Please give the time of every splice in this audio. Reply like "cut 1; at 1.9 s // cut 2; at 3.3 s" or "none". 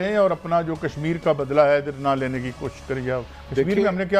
none

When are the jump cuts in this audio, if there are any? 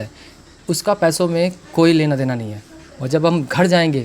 none

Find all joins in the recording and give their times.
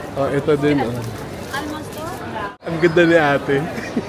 cut 1; at 2.6 s

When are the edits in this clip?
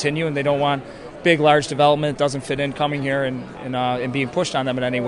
none

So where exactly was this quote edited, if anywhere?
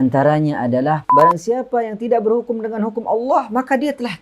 cut 1; at 1.0 s

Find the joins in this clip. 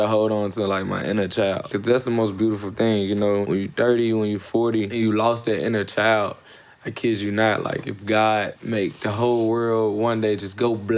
cut 1; at 1.7 s // cut 2; at 3.4 s // cut 3; at 4.9 s // cut 4; at 8.6 s

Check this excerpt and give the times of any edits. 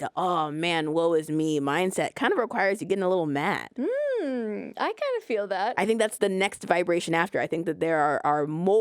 cut 1; at 3.7 s

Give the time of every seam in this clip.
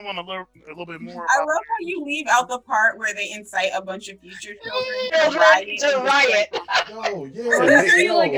none

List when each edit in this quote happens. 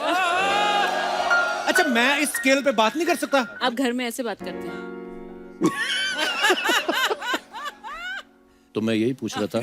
cut 1; at 3.5 s

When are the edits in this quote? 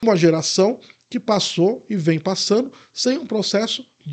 none

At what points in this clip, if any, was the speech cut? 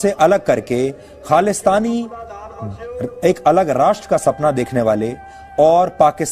none

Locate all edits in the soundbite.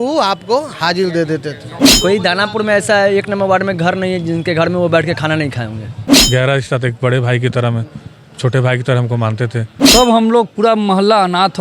cut 1; at 1.8 s // cut 2; at 6.1 s // cut 3; at 9.7 s

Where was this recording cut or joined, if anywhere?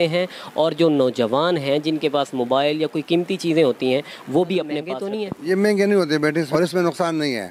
cut 1; at 5.0 s // cut 2; at 6.5 s

